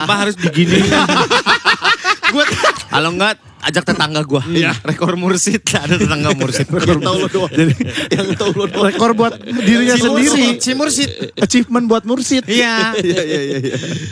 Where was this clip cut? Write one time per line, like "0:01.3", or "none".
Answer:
0:02.8